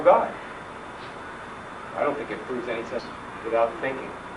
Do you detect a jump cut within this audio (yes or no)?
no